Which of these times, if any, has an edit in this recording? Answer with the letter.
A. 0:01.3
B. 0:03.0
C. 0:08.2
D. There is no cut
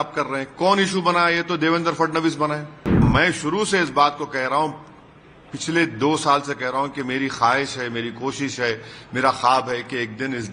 B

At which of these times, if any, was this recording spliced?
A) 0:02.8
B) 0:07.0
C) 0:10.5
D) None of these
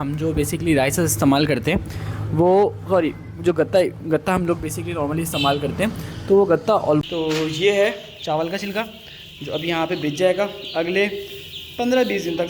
B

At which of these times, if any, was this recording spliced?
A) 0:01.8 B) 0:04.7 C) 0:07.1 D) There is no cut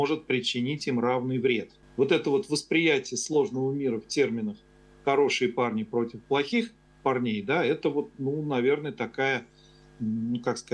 A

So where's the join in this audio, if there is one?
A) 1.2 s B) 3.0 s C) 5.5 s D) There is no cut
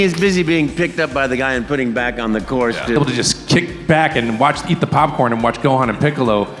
B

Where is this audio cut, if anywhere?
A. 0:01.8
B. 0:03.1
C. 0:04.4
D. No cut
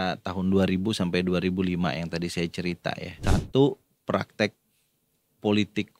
B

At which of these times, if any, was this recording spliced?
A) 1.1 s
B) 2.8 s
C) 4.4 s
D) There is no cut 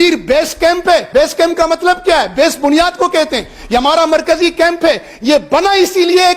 A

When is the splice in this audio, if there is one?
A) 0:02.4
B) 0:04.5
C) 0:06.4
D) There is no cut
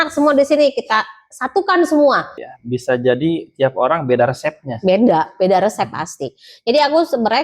A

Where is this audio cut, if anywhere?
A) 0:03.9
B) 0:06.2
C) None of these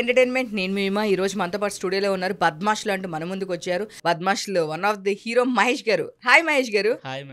A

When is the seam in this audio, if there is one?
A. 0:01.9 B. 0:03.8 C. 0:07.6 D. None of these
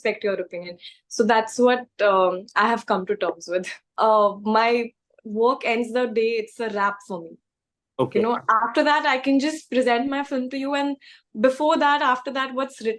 B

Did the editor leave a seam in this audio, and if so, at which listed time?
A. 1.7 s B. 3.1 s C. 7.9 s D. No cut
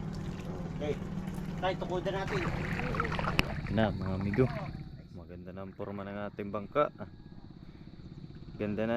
B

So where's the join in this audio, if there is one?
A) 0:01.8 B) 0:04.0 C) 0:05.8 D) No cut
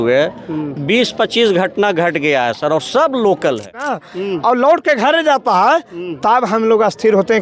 B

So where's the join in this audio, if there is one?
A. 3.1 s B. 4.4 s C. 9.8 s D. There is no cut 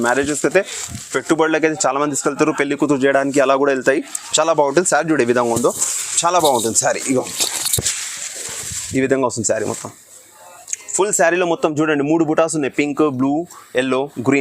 D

